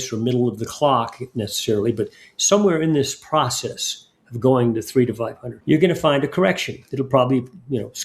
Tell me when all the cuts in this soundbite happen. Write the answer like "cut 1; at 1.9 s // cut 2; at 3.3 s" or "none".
cut 1; at 5.5 s